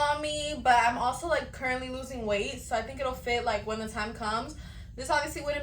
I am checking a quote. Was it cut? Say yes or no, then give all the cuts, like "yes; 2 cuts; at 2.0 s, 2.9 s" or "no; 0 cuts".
no; 0 cuts